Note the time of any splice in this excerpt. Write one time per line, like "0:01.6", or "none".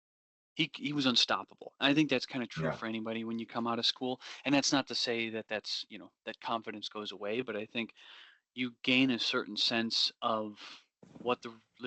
none